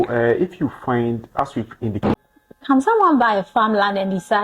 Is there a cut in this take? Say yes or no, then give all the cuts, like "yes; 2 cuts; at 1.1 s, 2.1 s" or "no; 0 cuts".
yes; 1 cut; at 2.1 s